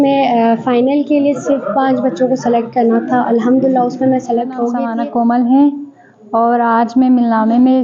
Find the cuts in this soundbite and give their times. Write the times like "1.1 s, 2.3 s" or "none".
4.8 s